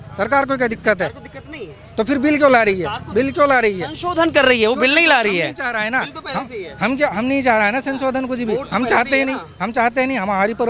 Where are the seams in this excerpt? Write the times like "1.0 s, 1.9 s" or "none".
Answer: none